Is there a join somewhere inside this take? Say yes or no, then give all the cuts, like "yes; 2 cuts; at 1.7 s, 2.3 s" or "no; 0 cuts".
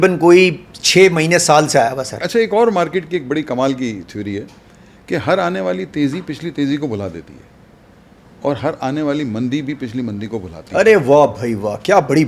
yes; 1 cut; at 2.2 s